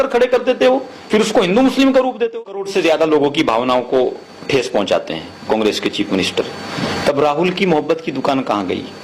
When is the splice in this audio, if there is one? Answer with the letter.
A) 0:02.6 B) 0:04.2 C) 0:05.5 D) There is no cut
A